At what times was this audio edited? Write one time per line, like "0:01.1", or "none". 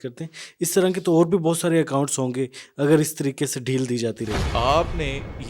0:04.5